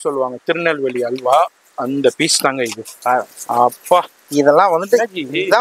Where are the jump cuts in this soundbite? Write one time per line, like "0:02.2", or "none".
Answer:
none